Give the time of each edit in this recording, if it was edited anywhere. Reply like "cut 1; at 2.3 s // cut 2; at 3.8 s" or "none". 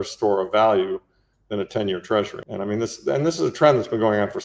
cut 1; at 2.4 s